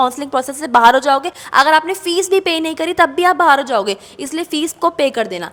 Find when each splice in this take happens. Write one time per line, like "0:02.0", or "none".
none